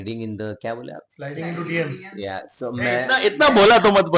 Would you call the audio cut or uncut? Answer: uncut